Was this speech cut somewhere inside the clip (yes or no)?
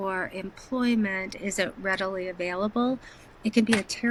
no